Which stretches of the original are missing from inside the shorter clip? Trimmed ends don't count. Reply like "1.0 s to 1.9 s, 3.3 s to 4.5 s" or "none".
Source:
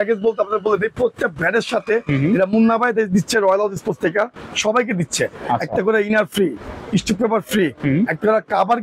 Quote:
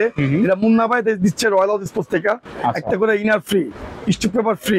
4.4 s to 5.4 s